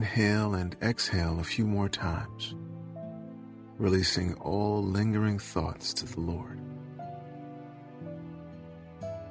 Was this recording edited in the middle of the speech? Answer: yes; 3 cuts; at 2.3 s, 3.7 s, 6.4 s

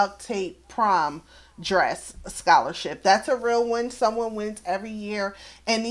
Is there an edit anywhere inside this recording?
no; 0 cuts

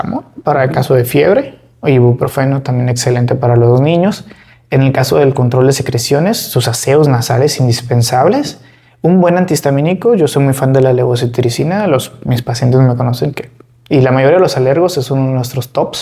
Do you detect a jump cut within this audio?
no; 0 cuts

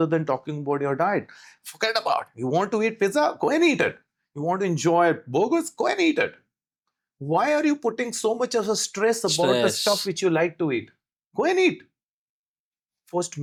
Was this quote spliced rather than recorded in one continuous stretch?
no; 0 cuts

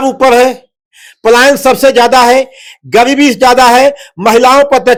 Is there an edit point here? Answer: no; 0 cuts

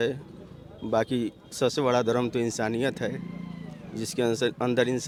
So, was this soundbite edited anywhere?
no; 0 cuts

